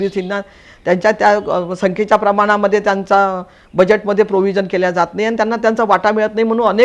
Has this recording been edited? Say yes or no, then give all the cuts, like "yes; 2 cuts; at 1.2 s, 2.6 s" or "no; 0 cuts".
no; 0 cuts